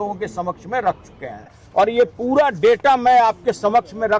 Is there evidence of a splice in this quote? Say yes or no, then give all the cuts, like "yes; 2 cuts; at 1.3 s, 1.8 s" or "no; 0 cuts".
yes; 1 cut; at 1.6 s